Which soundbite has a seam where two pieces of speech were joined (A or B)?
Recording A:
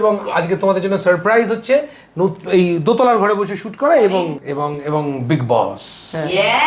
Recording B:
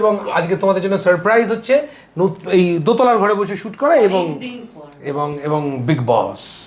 A